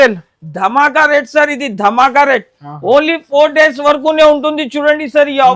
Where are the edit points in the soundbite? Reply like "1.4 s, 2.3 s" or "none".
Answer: none